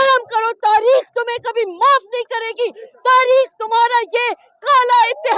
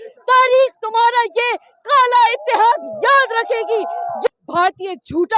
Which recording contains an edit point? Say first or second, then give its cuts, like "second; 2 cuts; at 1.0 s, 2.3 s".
second; 1 cut; at 4.3 s